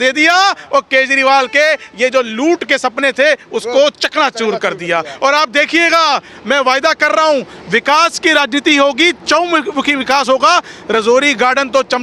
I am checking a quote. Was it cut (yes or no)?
no